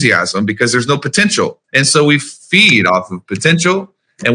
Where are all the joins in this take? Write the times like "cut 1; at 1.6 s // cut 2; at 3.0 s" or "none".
cut 1; at 1.6 s